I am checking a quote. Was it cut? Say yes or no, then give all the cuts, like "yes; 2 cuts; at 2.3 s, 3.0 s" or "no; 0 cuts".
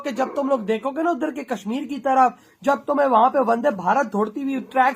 no; 0 cuts